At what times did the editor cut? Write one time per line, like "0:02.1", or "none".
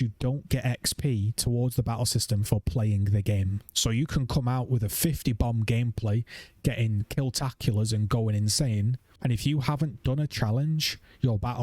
0:03.6
0:09.0